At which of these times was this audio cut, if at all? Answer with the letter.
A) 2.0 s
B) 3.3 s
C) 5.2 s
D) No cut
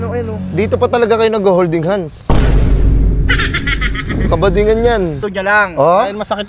C